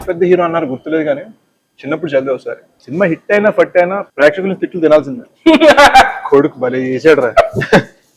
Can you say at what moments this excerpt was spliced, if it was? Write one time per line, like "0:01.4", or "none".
0:02.7
0:04.0